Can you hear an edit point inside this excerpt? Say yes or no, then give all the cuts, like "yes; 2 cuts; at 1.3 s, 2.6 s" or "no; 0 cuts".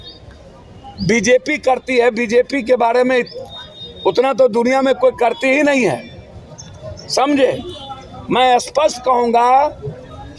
no; 0 cuts